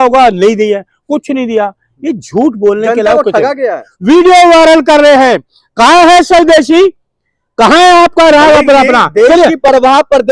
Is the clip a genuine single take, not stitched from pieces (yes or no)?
no